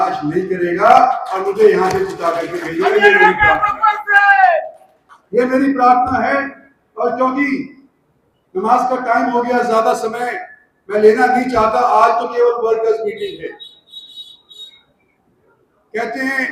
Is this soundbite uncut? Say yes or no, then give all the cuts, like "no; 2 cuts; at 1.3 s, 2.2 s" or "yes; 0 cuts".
yes; 0 cuts